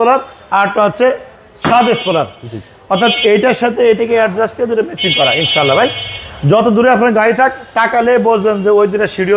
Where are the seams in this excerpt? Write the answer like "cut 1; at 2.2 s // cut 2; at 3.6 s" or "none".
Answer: none